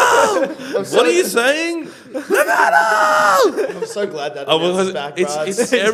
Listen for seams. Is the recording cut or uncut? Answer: uncut